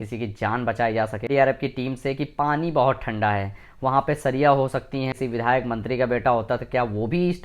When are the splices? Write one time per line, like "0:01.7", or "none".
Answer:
0:01.3
0:05.1